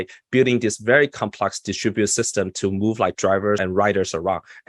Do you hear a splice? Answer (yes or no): yes